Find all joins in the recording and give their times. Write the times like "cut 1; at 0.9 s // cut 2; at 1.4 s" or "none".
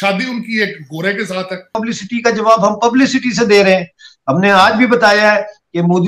cut 1; at 1.8 s